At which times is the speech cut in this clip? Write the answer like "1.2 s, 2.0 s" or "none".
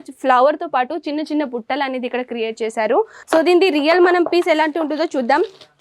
3.2 s